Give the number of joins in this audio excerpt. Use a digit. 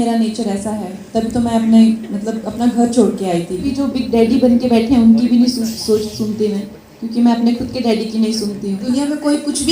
2